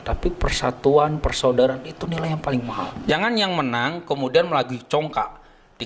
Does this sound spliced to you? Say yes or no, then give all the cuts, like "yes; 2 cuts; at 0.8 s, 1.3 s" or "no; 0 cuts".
yes; 1 cut; at 3.0 s